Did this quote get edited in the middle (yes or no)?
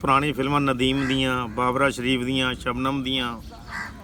no